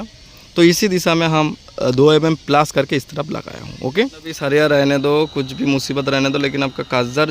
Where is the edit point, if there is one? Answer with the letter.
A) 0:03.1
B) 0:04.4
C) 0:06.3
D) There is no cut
B